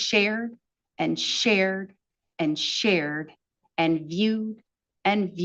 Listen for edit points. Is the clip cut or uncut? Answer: uncut